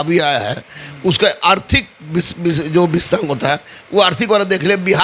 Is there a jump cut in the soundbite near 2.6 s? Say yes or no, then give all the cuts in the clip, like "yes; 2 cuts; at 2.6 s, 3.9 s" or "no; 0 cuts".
no; 0 cuts